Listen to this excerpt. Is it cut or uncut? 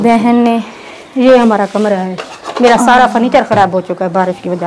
uncut